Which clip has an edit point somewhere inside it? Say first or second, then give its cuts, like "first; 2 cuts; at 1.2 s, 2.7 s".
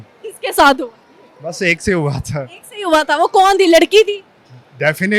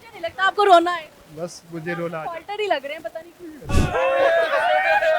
second; 1 cut; at 3.7 s